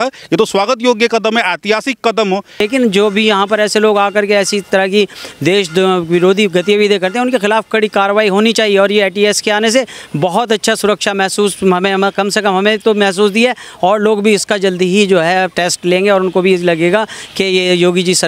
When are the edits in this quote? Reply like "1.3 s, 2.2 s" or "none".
2.6 s